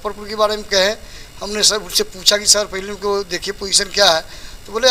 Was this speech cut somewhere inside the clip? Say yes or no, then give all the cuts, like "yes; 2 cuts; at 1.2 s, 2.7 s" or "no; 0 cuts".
no; 0 cuts